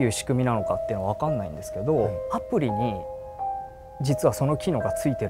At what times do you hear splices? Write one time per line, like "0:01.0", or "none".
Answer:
0:02.2